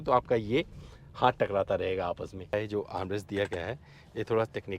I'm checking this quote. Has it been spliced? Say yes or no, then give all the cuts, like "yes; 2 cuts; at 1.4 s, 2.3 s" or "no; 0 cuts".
yes; 1 cut; at 2.5 s